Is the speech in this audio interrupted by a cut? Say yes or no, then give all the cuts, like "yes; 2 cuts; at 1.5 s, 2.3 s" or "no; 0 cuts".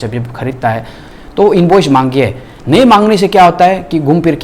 yes; 1 cut; at 1.1 s